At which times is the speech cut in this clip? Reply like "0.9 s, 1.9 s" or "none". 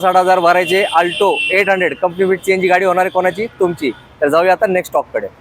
none